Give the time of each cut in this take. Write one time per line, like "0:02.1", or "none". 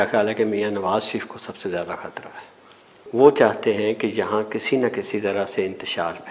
0:03.0